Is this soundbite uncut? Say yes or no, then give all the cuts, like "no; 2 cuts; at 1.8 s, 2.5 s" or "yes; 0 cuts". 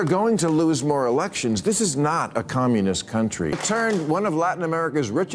no; 1 cut; at 3.6 s